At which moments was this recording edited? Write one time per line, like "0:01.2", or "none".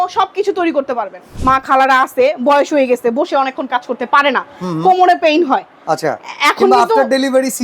0:01.4